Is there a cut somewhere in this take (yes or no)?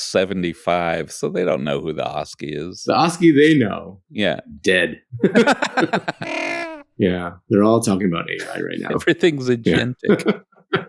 yes